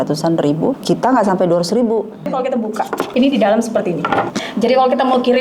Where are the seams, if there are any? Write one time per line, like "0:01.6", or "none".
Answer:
0:00.8
0:02.6
0:04.4